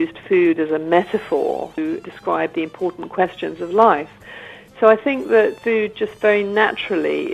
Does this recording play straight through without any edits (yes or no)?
no